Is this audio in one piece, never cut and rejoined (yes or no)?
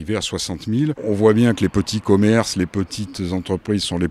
no